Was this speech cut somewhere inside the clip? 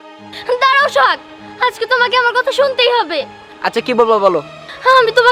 no; 0 cuts

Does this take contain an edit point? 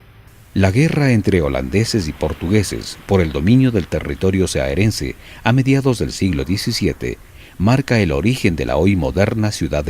yes; 1 cut; at 9.0 s

